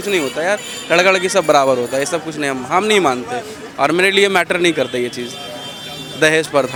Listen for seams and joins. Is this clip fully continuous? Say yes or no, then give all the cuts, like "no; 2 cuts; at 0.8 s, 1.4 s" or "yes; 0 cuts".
yes; 0 cuts